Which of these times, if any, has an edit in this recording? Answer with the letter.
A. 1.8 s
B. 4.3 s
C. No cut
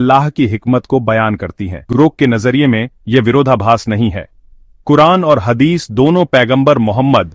A